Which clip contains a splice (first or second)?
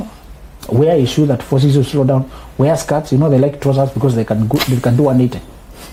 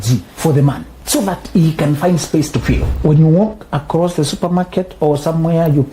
second